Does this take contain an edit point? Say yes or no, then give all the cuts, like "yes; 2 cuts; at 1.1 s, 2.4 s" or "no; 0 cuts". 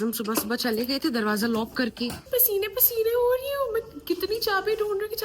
yes; 1 cut; at 2.2 s